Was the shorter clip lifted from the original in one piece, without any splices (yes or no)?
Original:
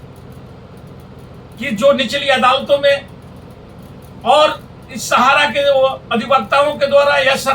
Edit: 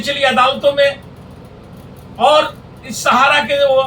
yes